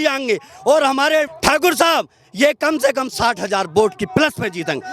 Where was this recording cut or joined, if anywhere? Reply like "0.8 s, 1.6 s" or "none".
1.3 s